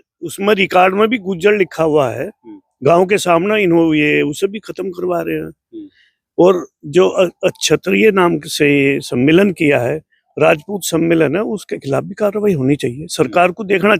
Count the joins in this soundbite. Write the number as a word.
zero